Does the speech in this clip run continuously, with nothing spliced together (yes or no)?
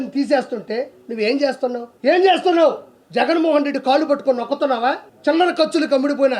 no